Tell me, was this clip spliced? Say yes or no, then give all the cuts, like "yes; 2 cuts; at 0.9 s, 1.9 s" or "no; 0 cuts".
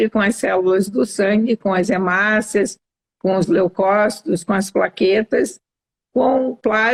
no; 0 cuts